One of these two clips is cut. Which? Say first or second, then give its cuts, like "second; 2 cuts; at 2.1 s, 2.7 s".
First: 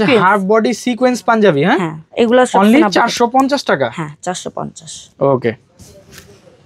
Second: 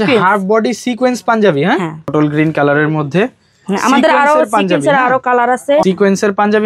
second; 2 cuts; at 2.1 s, 5.8 s